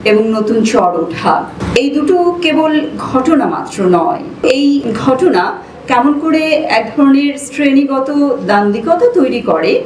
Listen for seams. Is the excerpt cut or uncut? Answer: cut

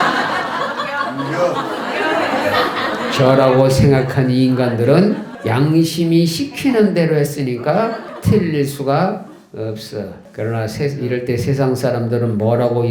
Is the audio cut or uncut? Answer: cut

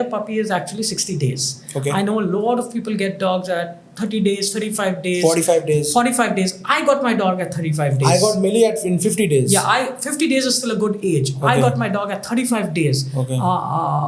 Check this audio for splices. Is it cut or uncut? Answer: uncut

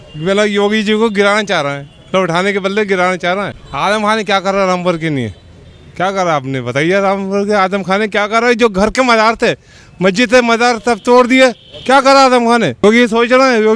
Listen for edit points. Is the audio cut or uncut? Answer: cut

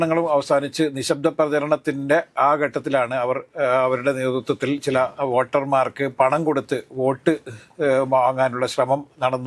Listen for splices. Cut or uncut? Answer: uncut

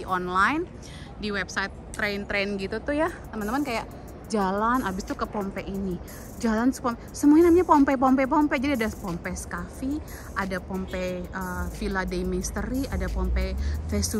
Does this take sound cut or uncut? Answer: uncut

